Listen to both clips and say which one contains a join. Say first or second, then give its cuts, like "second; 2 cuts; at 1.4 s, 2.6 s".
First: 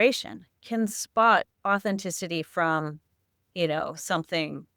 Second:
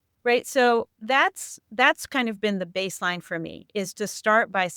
first; 1 cut; at 1.6 s